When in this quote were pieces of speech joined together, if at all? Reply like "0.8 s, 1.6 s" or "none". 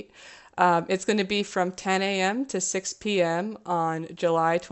none